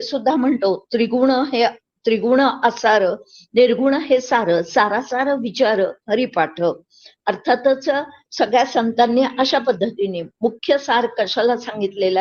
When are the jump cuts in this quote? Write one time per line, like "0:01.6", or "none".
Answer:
0:08.2